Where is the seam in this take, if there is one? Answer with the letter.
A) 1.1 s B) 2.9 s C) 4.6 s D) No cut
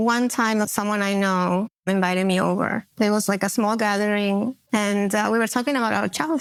D